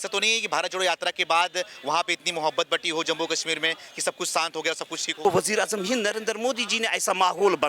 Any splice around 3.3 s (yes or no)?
no